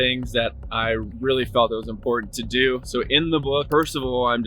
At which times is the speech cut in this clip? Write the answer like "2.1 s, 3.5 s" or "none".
1.1 s, 3.7 s